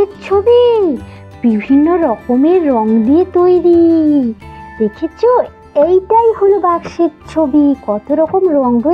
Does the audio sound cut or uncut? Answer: uncut